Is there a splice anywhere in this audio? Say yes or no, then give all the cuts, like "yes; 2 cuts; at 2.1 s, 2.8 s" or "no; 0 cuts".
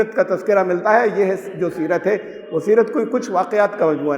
no; 0 cuts